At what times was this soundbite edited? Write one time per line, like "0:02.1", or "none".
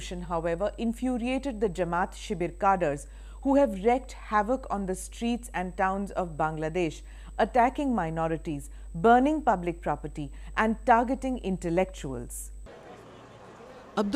0:02.6